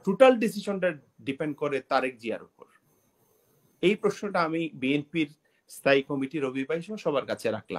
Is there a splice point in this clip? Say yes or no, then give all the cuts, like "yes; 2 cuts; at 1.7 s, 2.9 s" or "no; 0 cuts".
no; 0 cuts